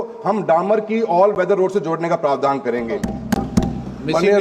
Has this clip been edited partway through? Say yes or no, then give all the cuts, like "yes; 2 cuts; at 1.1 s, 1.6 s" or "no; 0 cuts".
yes; 1 cut; at 3.1 s